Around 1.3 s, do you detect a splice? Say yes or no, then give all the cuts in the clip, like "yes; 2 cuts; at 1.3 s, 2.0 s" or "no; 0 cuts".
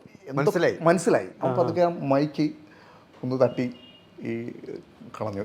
yes; 1 cut; at 1.3 s